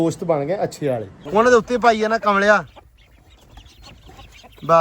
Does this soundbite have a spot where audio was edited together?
yes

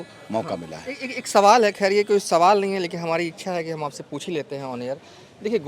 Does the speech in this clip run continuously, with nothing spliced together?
yes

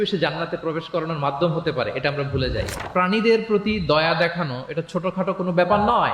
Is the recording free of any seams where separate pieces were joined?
no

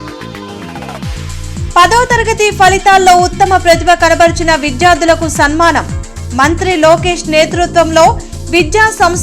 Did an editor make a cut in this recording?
no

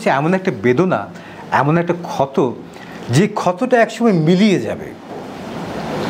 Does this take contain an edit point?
no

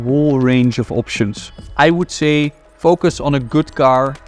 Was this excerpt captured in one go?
no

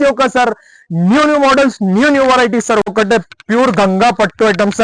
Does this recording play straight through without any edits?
no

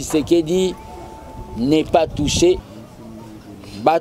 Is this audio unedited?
no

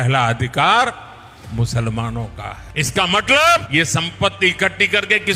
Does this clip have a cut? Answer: yes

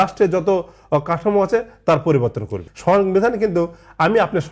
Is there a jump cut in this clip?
yes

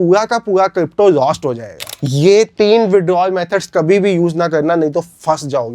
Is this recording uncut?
no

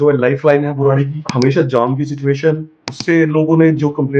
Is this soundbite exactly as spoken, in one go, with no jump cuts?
no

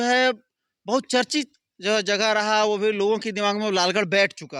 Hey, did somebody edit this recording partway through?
no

